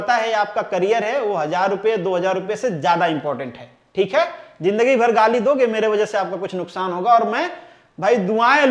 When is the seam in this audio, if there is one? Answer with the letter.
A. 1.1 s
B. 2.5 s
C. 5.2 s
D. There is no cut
D